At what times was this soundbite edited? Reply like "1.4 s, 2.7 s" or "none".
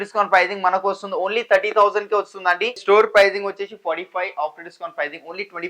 2.8 s